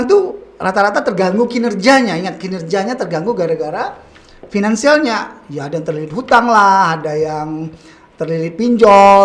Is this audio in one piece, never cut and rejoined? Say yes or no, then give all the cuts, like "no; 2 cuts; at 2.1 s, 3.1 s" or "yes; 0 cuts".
yes; 0 cuts